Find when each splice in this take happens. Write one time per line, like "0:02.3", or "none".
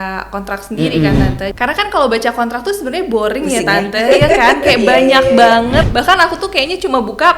0:01.5
0:05.9